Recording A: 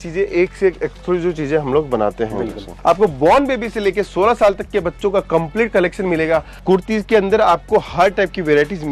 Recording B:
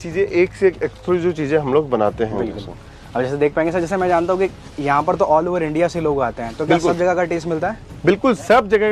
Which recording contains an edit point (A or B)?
A